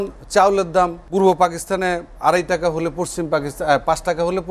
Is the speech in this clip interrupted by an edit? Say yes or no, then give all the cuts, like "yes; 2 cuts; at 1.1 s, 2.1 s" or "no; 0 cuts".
yes; 2 cuts; at 1.0 s, 2.1 s